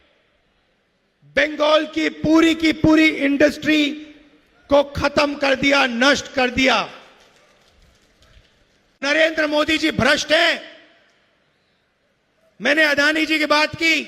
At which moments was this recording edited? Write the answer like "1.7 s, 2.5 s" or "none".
9.0 s